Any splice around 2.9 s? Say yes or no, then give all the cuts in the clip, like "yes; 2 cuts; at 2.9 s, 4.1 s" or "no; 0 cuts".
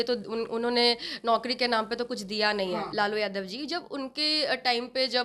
yes; 1 cut; at 2.9 s